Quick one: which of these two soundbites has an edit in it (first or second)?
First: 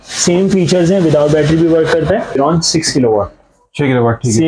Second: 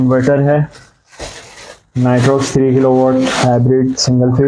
first